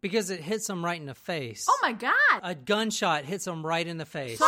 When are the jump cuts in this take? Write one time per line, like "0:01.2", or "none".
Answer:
0:02.4